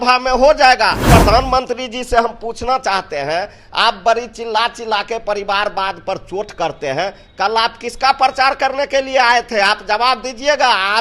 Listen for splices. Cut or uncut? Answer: cut